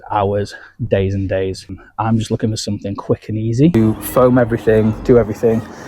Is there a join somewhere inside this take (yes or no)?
yes